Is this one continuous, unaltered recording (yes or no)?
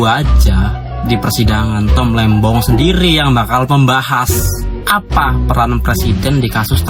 yes